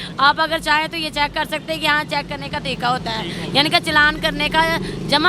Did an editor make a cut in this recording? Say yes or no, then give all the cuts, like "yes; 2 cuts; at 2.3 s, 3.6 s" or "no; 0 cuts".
no; 0 cuts